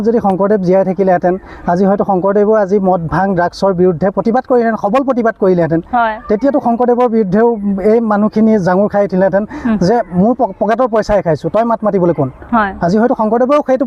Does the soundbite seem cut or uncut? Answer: uncut